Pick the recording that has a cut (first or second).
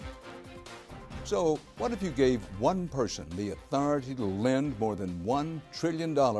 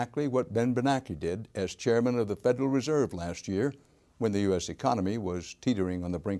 first